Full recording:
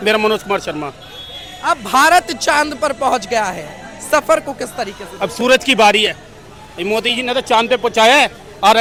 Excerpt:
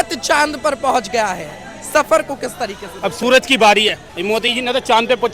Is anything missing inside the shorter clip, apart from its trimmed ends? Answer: yes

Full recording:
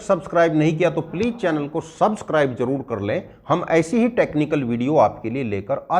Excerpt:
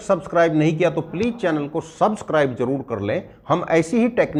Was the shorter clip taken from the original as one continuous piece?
yes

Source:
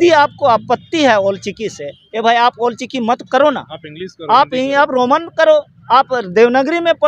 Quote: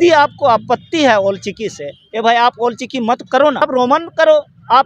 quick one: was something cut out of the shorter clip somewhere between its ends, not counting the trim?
yes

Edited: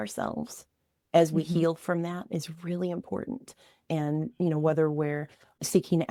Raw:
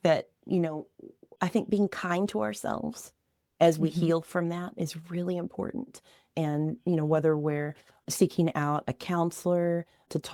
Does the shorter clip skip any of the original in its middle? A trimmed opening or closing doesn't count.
no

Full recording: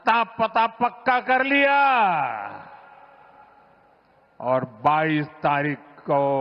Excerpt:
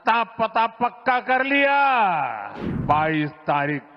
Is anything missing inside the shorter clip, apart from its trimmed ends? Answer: yes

